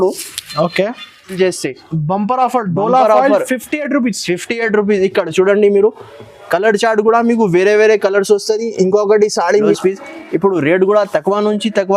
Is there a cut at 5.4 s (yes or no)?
no